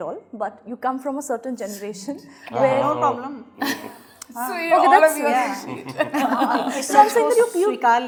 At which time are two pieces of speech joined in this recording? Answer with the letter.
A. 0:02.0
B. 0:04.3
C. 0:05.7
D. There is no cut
D